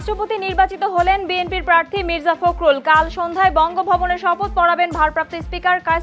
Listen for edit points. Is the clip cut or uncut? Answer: uncut